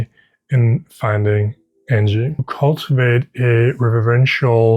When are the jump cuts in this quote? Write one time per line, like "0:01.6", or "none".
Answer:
0:02.5